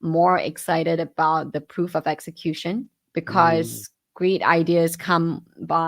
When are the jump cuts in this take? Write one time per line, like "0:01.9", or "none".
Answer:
none